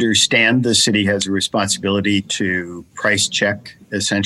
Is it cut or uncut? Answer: uncut